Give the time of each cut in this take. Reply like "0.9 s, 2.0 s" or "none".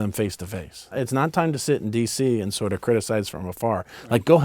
0.9 s